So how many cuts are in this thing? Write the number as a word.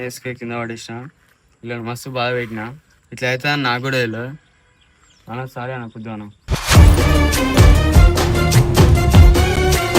zero